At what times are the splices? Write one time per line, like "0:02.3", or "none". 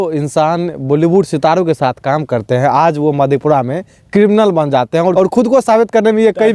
0:05.1